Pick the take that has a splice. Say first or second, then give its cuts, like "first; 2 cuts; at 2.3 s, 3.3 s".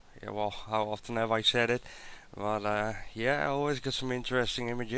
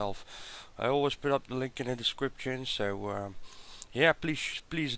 second; 1 cut; at 3.0 s